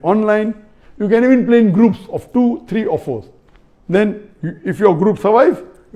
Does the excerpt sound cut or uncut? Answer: uncut